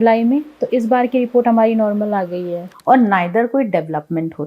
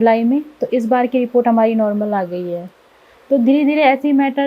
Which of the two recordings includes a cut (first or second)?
first